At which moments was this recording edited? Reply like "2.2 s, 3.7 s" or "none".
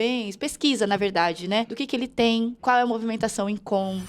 1.8 s, 2.6 s